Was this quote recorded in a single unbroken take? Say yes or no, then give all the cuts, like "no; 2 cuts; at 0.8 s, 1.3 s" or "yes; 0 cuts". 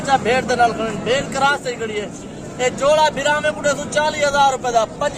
yes; 0 cuts